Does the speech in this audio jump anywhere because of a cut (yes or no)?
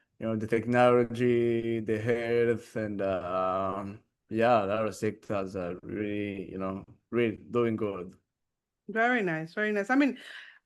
no